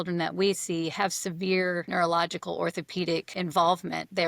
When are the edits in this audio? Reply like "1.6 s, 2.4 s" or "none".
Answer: 1.8 s, 3.3 s